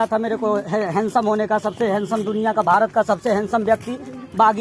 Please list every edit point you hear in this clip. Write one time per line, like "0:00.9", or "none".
none